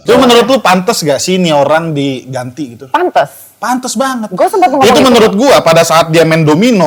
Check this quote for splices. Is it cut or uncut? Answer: uncut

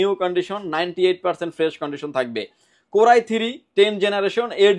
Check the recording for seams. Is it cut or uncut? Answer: uncut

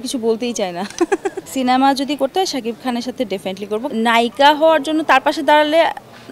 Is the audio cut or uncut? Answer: cut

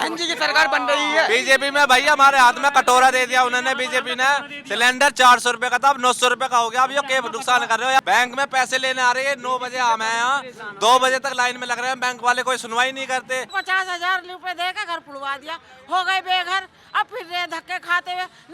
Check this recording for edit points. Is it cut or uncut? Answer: cut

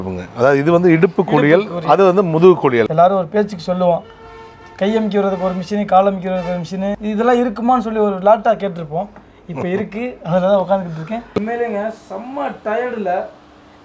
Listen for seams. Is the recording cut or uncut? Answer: cut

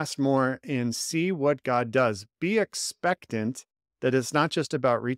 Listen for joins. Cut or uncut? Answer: uncut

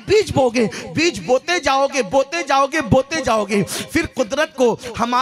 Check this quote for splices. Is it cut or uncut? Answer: uncut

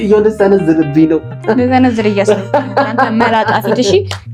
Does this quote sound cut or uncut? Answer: uncut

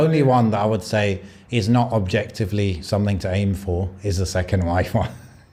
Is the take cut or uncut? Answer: uncut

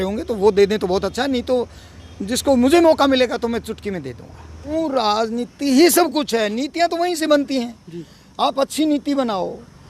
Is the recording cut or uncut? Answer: cut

